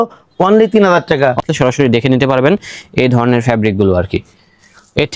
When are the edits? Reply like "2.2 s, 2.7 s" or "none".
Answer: 1.4 s